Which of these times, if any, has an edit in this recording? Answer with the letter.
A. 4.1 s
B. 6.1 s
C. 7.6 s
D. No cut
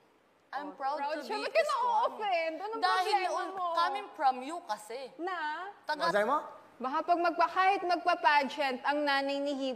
B